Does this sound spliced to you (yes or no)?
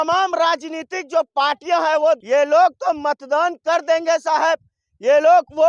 yes